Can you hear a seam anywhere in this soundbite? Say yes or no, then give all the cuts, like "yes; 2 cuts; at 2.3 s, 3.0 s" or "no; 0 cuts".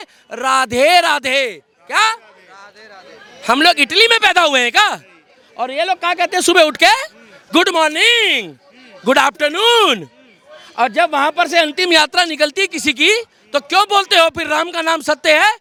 no; 0 cuts